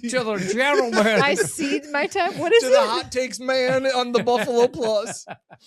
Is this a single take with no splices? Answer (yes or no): yes